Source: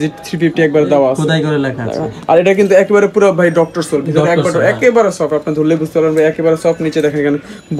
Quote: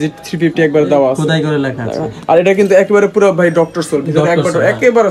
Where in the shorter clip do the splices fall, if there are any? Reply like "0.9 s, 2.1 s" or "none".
none